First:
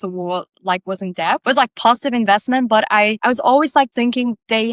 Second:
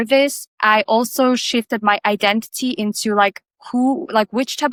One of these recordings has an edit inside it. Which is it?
first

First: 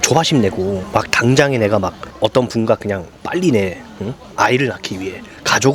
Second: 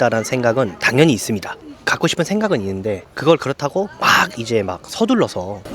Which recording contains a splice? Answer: second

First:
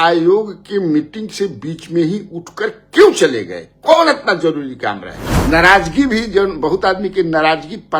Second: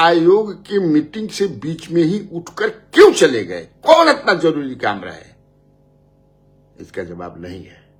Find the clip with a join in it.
first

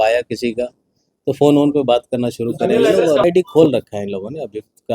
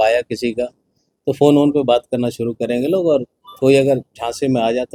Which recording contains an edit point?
first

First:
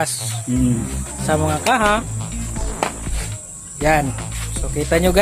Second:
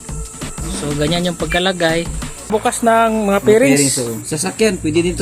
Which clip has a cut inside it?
second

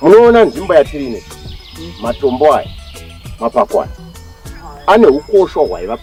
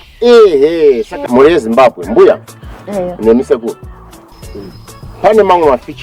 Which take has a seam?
second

